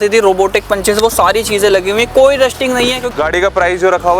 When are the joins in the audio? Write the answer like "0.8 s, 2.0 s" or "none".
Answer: 3.0 s